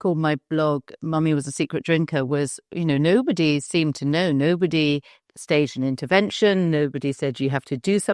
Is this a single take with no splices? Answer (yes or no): yes